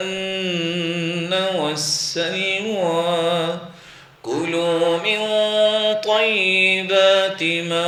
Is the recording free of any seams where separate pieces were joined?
yes; 0 cuts

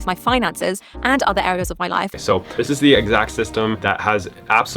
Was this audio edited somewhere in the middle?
yes; 1 cut; at 2.1 s

